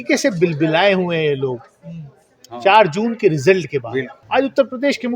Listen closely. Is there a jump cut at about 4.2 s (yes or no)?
yes